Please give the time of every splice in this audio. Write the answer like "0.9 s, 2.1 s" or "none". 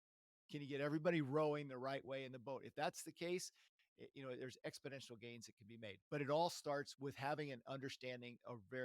6.9 s